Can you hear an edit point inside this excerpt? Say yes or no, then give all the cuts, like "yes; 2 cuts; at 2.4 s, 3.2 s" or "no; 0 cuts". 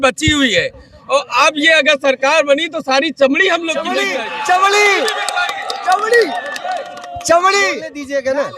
yes; 2 cuts; at 4.1 s, 7.7 s